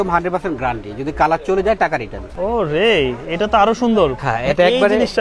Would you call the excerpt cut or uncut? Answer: cut